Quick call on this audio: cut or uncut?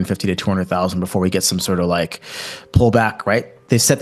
uncut